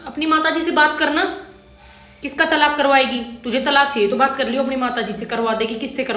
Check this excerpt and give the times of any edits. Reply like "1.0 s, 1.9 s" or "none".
none